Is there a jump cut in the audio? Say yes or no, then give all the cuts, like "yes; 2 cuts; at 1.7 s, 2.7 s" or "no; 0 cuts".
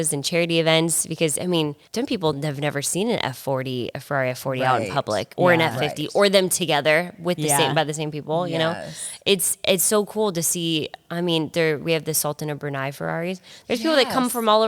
yes; 1 cut; at 1.8 s